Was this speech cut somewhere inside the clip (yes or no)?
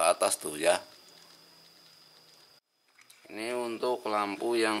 yes